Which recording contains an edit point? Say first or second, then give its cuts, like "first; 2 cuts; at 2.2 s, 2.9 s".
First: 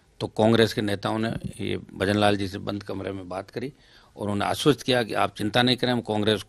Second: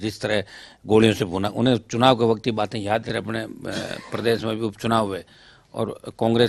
second; 1 cut; at 3.1 s